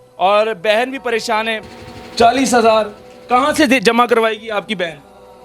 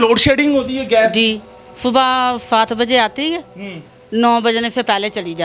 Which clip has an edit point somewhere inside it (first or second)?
first